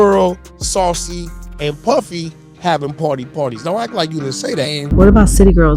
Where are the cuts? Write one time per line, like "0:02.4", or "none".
0:04.8

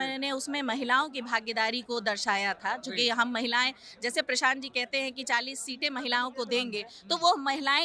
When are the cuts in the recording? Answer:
none

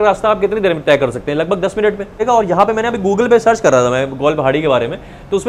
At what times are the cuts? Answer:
0:02.2

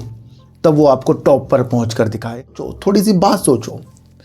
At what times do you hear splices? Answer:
0:02.7

